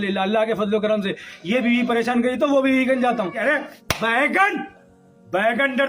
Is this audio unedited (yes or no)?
no